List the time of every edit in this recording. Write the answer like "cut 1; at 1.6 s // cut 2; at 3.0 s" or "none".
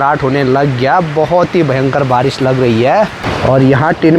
cut 1; at 3.2 s